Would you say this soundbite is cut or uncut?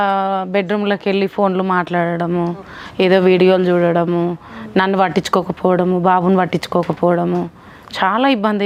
uncut